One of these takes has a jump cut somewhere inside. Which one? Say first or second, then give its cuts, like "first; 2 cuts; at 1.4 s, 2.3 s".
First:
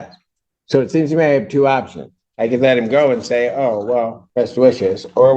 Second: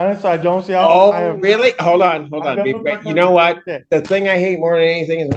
first; 1 cut; at 4.2 s